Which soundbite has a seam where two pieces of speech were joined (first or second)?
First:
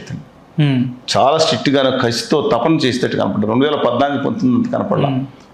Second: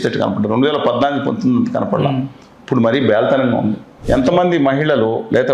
second